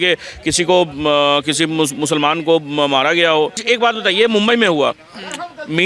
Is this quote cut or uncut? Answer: cut